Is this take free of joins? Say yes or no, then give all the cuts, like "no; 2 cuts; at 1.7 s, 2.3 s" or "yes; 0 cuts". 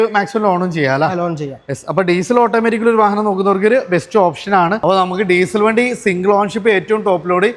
no; 1 cut; at 4.8 s